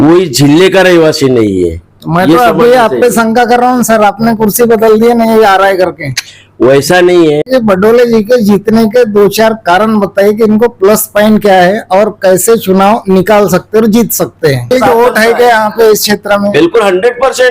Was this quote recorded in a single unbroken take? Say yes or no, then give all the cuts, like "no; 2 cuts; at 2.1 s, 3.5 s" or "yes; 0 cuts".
no; 2 cuts; at 7.5 s, 14.7 s